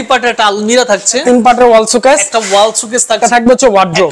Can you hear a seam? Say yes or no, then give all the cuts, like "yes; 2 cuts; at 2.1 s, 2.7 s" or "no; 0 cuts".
yes; 2 cuts; at 1.2 s, 3.2 s